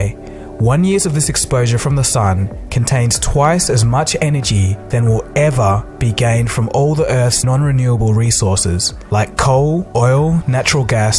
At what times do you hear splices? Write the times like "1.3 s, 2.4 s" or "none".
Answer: none